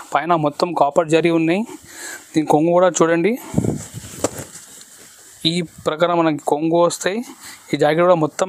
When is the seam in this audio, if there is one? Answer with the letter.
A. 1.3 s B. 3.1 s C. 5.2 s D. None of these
D